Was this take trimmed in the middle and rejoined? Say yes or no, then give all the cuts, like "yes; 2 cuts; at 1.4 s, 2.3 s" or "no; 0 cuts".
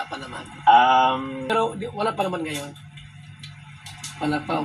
yes; 1 cut; at 1.5 s